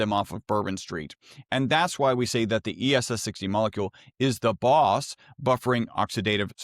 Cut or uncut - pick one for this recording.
uncut